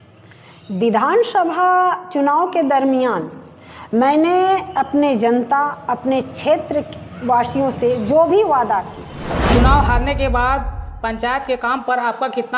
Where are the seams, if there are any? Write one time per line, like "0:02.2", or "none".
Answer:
0:09.4